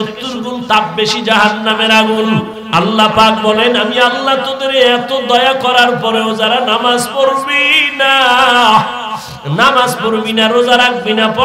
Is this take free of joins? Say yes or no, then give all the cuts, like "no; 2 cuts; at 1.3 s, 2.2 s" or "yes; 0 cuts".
no; 1 cut; at 2.6 s